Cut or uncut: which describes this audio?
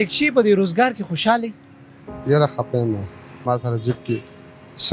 cut